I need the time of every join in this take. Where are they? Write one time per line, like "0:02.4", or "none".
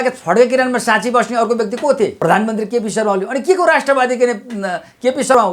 0:02.2